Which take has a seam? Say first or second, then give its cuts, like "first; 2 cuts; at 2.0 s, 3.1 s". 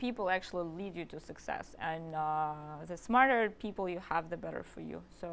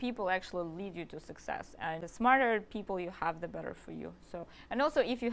second; 2 cuts; at 2.0 s, 4.5 s